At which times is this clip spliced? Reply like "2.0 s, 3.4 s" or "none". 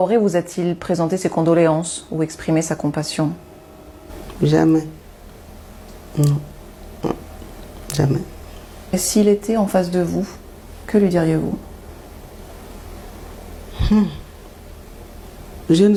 none